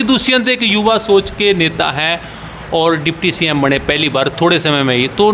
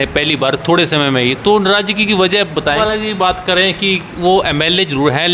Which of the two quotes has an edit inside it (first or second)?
second